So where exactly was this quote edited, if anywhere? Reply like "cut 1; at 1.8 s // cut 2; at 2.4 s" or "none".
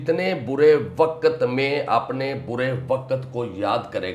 none